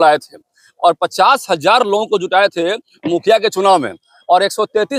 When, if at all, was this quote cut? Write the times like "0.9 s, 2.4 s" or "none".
none